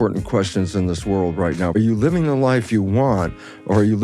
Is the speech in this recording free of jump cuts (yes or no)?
no